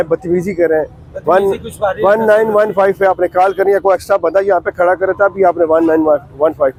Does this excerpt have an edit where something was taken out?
no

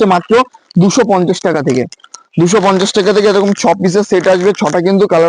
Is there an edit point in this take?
no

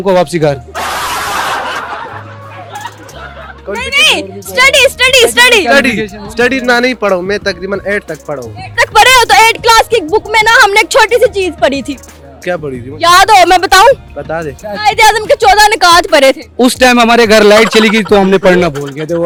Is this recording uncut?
yes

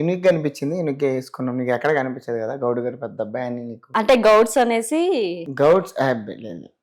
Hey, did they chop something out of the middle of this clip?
no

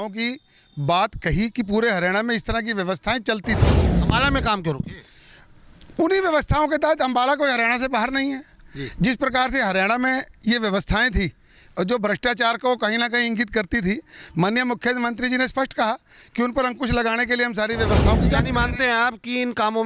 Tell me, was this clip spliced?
no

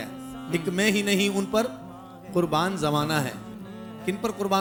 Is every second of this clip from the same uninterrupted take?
yes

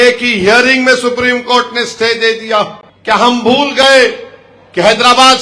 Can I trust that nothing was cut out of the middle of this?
no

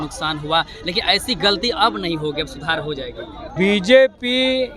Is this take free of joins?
no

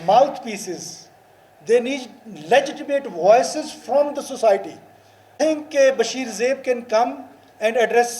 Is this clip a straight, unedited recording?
yes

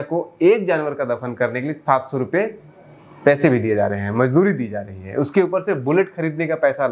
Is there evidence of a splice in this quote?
no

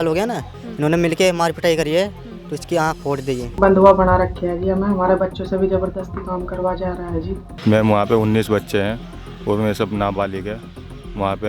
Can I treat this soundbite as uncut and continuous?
no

